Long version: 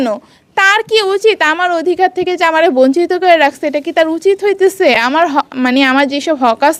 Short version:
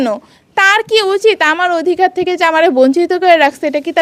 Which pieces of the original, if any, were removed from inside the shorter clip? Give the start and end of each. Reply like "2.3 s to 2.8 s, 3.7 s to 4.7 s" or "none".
none